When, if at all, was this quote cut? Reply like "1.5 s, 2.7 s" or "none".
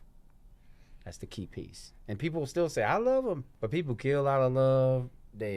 3.5 s